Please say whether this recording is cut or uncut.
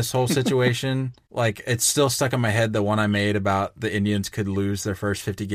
cut